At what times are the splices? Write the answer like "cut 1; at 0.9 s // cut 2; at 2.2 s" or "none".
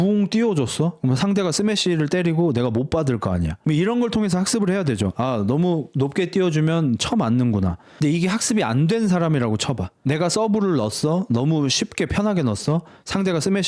cut 1; at 7.9 s